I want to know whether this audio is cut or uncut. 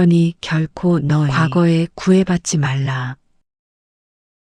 cut